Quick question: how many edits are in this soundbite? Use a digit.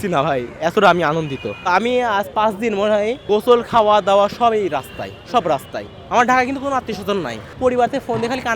3